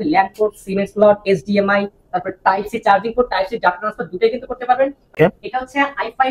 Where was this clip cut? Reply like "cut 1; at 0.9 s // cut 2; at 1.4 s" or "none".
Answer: cut 1; at 5.2 s